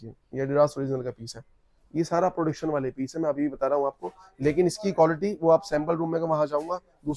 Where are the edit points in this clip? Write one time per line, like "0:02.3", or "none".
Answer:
none